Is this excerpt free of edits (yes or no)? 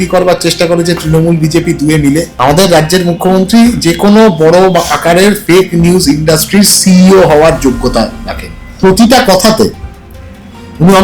no